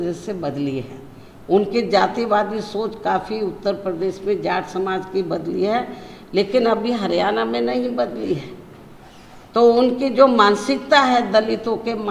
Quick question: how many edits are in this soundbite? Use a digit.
0